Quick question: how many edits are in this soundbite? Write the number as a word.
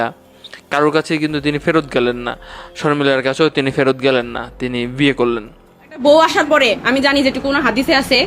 one